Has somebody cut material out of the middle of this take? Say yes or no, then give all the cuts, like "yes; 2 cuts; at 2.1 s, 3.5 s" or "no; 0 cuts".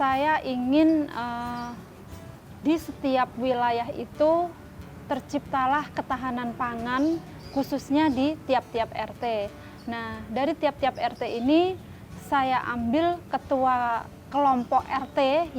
no; 0 cuts